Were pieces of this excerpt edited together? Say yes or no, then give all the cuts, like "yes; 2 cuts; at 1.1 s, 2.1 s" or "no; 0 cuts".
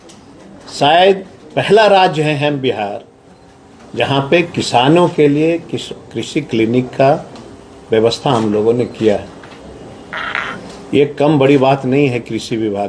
no; 0 cuts